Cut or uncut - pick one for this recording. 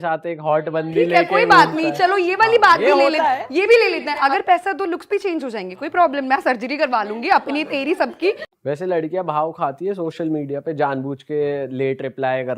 cut